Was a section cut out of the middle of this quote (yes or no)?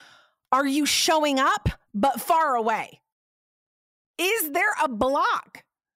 no